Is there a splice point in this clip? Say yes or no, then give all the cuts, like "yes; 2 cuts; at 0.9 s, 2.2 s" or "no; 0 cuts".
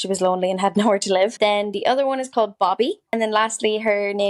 yes; 2 cuts; at 1.3 s, 3.1 s